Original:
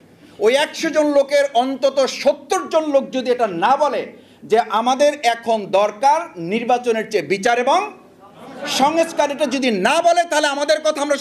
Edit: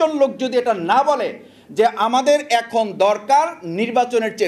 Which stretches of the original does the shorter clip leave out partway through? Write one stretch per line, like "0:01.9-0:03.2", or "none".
none